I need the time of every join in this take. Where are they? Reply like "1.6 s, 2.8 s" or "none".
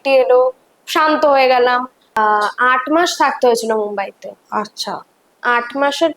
2.1 s